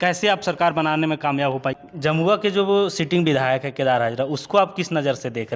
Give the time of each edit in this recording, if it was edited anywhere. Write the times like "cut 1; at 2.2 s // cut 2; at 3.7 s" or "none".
cut 1; at 1.9 s